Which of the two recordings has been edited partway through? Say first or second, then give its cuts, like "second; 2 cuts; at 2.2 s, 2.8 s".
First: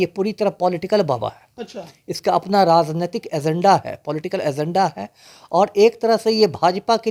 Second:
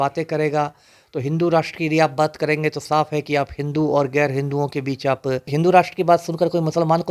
second; 1 cut; at 5.5 s